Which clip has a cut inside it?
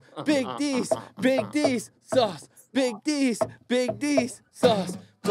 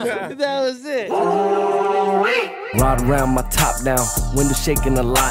second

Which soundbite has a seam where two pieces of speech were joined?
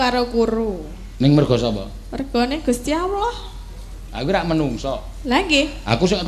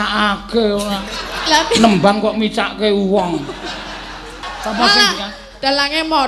second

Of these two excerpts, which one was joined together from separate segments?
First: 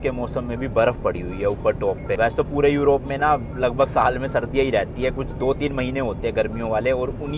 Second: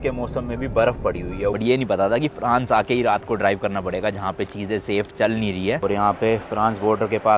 second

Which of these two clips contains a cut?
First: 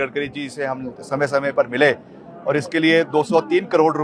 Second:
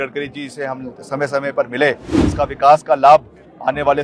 second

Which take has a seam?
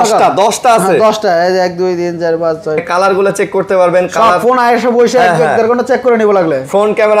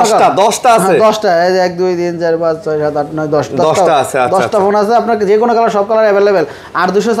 first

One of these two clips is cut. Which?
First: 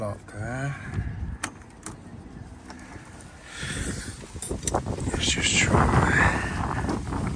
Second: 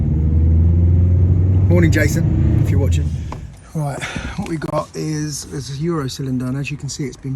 second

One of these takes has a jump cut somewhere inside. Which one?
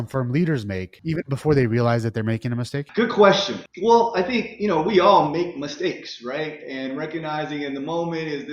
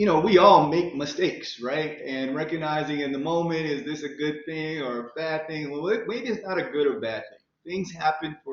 first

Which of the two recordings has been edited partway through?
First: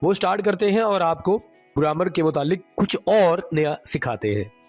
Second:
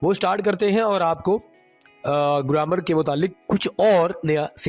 first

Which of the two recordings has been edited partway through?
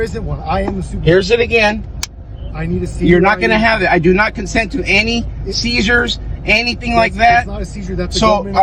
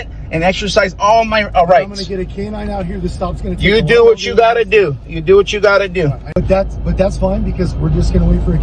second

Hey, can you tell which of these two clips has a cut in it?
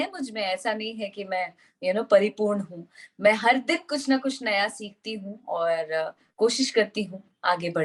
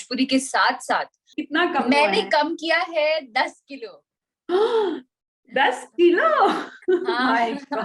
second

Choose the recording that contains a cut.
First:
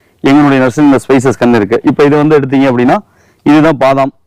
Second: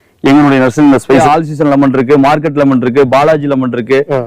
second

